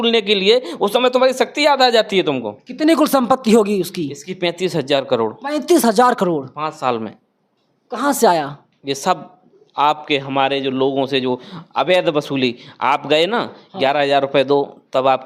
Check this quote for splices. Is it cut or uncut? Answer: uncut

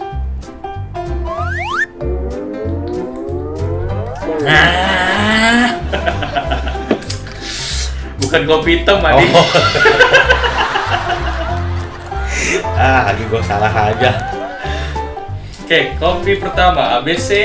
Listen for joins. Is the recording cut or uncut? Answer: uncut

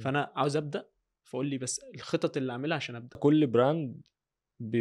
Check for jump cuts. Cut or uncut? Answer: cut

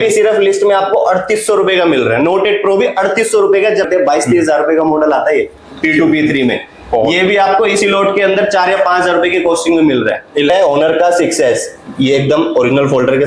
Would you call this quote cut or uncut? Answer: cut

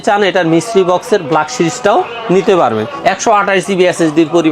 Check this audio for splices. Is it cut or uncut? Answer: cut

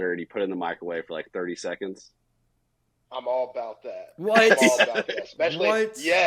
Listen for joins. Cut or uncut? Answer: uncut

